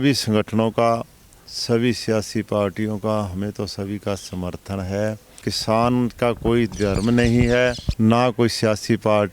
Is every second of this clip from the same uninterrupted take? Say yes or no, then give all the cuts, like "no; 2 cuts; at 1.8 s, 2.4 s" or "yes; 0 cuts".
no; 2 cuts; at 5.3 s, 7.8 s